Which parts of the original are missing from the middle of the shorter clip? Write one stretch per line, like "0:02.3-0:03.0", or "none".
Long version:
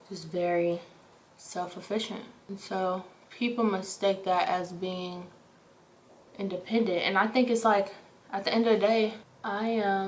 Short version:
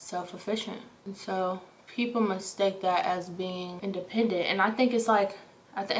0:05.1-0:06.3